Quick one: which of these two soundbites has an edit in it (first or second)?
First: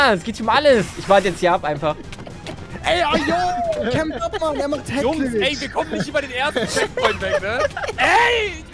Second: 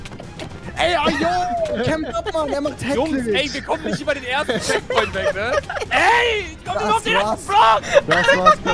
first